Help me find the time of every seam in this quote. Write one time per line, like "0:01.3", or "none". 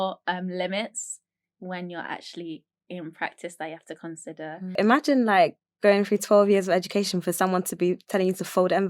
0:04.8